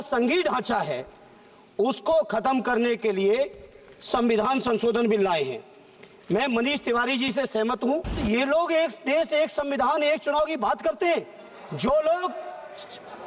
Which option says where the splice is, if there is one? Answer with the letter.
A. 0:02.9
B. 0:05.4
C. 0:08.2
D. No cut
C